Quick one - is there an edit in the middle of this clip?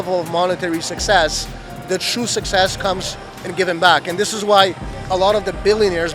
no; 0 cuts

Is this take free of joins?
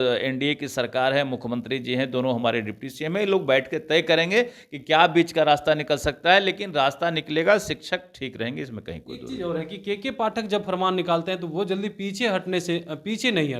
yes; 0 cuts

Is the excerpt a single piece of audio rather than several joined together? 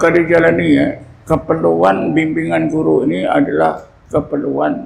no; 2 cuts; at 1.1 s, 3.9 s

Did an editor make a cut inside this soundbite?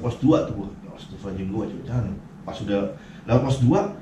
no; 0 cuts

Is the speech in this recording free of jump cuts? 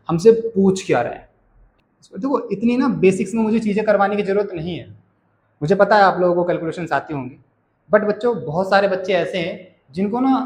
no; 1 cut; at 1.6 s

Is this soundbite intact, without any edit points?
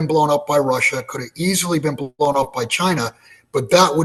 yes; 0 cuts

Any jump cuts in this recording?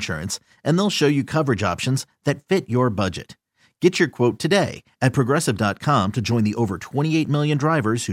no; 0 cuts

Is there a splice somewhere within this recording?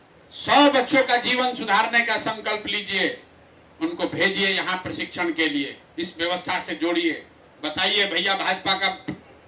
no; 0 cuts

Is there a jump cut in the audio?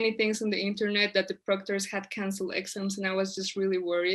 no; 0 cuts

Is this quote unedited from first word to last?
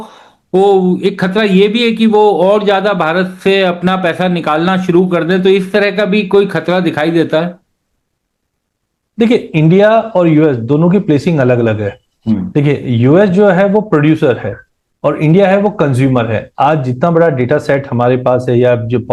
yes; 0 cuts

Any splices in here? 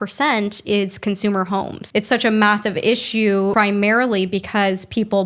yes; 2 cuts; at 1.8 s, 3.5 s

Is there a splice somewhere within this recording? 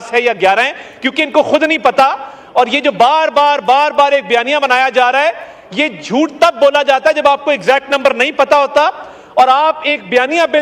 no; 0 cuts

